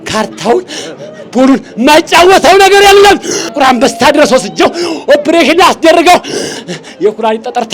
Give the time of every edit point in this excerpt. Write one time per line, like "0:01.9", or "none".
0:03.4